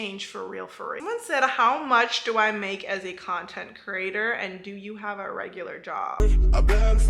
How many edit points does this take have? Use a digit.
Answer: 2